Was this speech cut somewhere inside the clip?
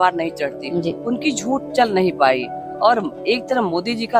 no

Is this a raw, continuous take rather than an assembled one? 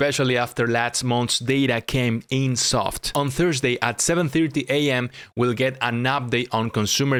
yes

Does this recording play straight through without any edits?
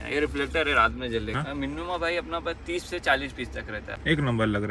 no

